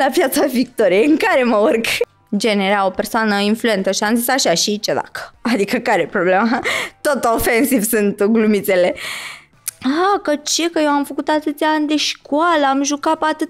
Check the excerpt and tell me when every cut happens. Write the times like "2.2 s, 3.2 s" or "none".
2.2 s, 9.4 s